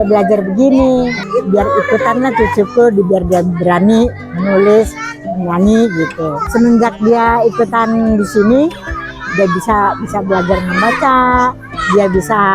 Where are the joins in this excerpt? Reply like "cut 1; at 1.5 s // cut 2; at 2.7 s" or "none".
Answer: cut 1; at 1.2 s // cut 2; at 6.4 s